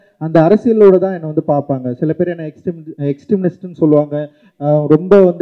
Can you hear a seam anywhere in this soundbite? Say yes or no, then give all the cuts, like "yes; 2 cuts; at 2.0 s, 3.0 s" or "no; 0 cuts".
no; 0 cuts